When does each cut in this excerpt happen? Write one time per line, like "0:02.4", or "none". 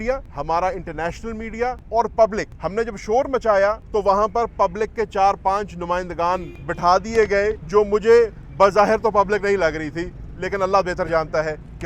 none